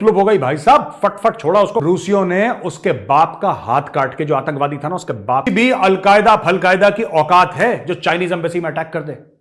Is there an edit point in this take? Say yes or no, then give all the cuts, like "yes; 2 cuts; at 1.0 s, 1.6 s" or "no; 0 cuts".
yes; 2 cuts; at 1.8 s, 5.5 s